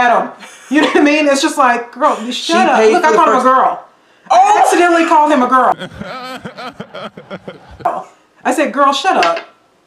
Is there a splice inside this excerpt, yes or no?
no